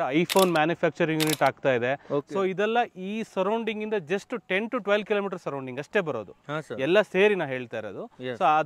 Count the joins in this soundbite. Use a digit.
0